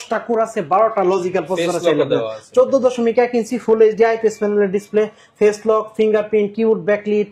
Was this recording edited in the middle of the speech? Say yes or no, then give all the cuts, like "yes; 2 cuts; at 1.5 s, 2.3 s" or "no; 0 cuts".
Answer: no; 0 cuts